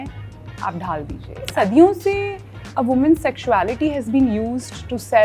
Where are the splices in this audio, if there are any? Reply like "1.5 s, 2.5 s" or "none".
1.5 s